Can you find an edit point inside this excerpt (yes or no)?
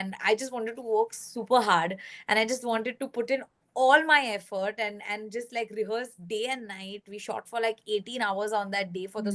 no